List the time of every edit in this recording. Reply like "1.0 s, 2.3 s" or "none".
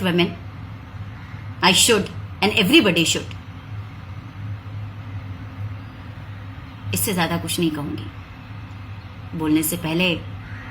none